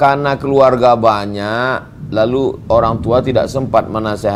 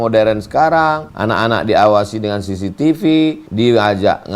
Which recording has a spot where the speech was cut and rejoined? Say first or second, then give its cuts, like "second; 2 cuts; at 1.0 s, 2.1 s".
second; 2 cuts; at 1.1 s, 3.4 s